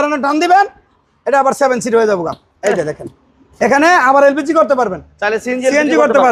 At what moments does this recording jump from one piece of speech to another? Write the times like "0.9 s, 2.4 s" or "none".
none